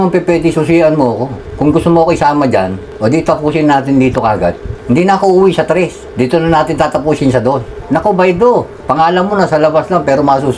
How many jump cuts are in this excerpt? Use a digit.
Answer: 2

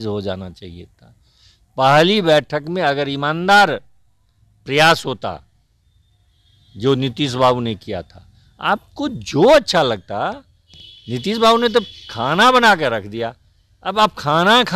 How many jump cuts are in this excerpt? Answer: 0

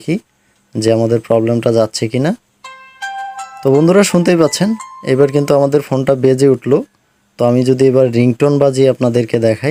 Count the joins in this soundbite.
0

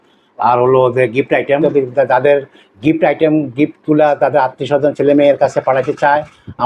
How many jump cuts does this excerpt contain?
1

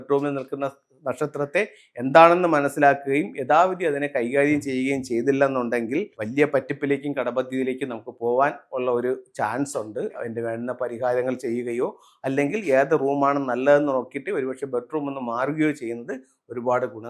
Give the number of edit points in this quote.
2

